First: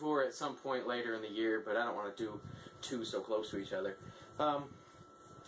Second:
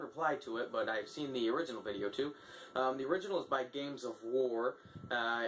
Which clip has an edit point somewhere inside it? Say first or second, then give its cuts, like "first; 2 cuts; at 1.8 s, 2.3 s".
first; 1 cut; at 2.4 s